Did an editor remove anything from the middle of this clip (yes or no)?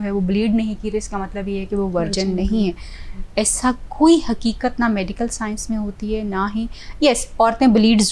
no